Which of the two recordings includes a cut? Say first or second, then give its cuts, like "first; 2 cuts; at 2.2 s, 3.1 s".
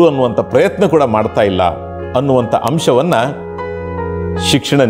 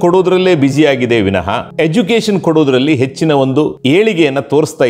second; 2 cuts; at 1.7 s, 3.8 s